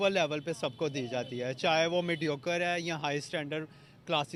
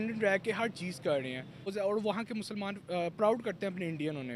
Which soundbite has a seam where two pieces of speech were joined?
second; 1 cut; at 1.7 s

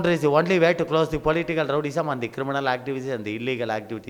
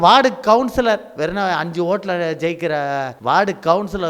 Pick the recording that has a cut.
second; 1 cut; at 3.1 s

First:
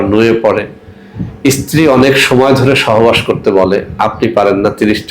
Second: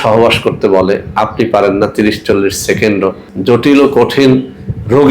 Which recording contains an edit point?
second; 1 cut; at 3.3 s

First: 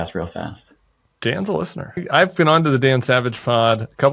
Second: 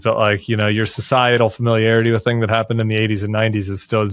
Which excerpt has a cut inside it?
first; 1 cut; at 2.0 s

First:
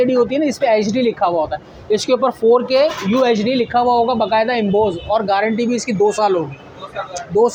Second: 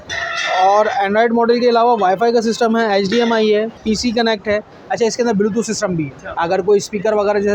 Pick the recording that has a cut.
second; 2 cuts; at 3.8 s, 6.2 s

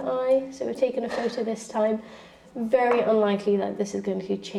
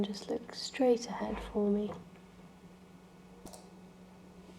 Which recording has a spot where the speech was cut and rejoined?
second; 1 cut; at 3.6 s

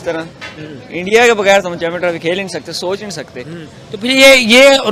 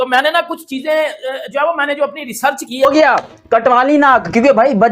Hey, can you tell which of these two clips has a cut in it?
second; 1 cut; at 2.9 s

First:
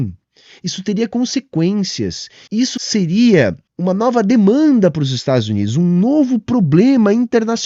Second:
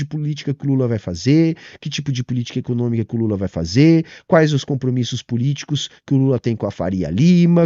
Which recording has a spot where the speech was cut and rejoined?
first; 2 cuts; at 2.8 s, 3.7 s

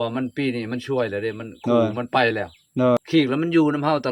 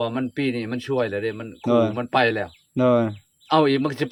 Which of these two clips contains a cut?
first; 1 cut; at 3.0 s

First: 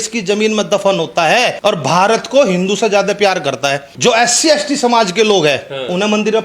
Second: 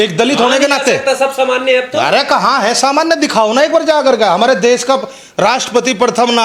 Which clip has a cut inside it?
first; 2 cuts; at 1.5 s, 3.9 s

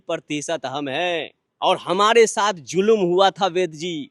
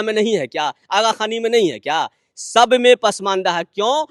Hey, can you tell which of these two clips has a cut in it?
first; 1 cut; at 1.4 s

